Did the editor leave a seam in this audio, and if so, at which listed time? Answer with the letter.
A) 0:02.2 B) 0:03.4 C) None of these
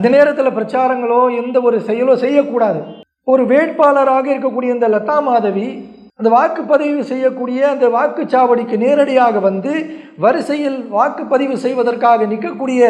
C